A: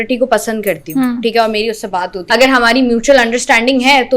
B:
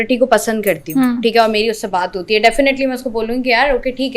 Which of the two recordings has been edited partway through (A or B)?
A